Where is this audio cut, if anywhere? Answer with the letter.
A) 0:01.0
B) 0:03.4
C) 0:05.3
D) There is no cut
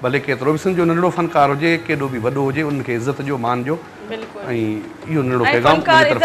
A